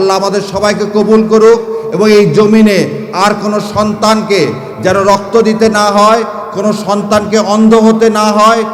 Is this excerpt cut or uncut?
uncut